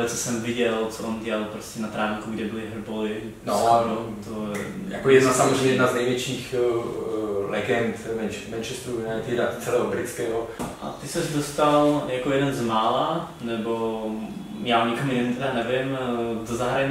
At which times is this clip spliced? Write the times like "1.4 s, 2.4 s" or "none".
10.5 s